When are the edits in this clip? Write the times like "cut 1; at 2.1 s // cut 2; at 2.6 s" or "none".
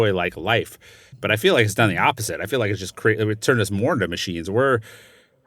cut 1; at 1.1 s